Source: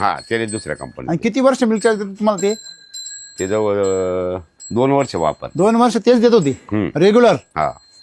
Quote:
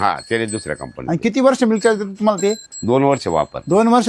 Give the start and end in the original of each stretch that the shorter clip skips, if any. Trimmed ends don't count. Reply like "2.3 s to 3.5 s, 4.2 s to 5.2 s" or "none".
2.7 s to 4.6 s